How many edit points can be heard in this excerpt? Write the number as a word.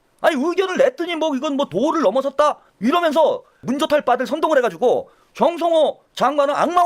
two